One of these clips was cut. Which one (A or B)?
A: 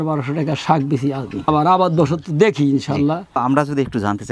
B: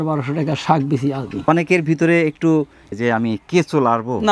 B